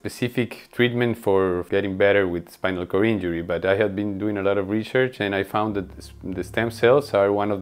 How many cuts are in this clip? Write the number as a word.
one